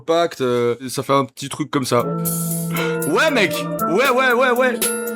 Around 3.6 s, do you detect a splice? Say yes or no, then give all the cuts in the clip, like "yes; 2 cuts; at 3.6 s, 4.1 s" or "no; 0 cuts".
no; 2 cuts; at 0.9 s, 2.1 s